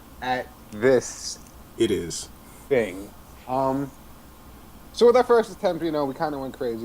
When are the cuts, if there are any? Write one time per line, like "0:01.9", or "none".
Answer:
0:05.5